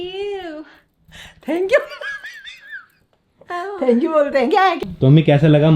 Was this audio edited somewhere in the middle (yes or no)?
yes